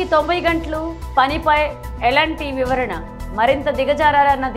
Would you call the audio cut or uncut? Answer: uncut